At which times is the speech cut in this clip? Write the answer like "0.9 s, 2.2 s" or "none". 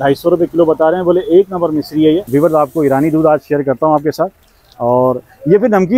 2.2 s